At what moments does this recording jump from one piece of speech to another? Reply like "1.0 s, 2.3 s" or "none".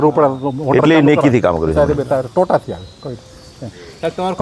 none